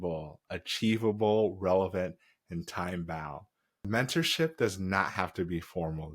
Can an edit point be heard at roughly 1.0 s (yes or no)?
no